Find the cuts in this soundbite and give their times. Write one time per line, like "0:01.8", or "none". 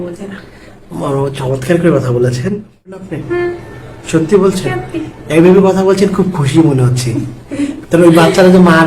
0:03.1